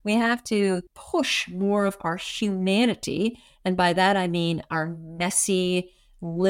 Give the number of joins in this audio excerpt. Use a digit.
1